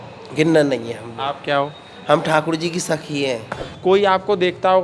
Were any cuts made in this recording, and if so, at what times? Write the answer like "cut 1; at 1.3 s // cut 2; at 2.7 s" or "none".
cut 1; at 3.7 s